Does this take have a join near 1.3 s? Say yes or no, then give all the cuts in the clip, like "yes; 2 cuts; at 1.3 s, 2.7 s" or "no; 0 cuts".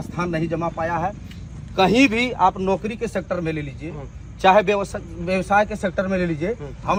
no; 0 cuts